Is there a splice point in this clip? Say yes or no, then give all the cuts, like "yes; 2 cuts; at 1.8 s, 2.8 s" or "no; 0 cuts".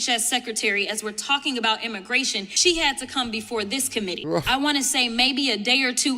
yes; 2 cuts; at 2.5 s, 4.2 s